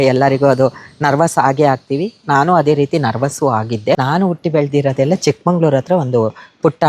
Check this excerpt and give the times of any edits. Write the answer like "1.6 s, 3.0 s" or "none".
4.0 s